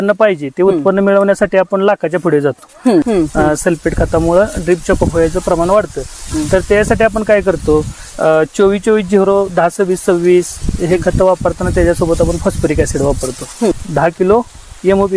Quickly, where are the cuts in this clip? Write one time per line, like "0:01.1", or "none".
0:03.0
0:13.7